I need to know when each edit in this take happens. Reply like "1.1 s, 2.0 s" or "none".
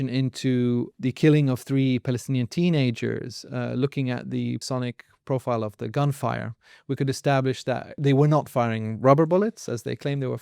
0.9 s, 4.6 s, 8.0 s